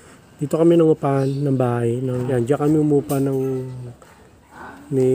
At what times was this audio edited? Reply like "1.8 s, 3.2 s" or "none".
2.3 s